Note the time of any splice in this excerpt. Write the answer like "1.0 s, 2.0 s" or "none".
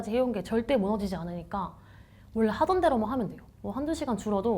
3.5 s